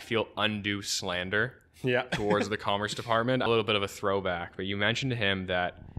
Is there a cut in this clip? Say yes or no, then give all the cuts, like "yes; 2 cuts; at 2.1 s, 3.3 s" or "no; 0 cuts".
yes; 1 cut; at 3.5 s